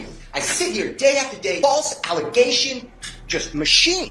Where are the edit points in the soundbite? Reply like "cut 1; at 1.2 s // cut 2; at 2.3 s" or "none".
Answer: cut 1; at 1.6 s